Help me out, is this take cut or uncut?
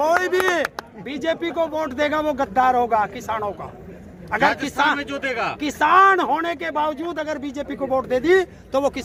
uncut